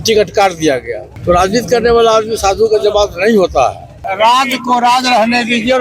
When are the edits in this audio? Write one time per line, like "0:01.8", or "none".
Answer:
0:01.0
0:04.0